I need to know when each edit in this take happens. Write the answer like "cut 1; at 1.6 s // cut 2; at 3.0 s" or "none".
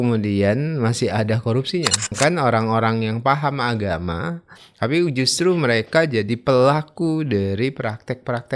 cut 1; at 2.1 s